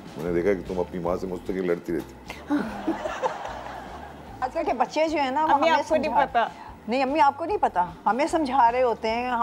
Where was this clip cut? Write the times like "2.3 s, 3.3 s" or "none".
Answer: 4.4 s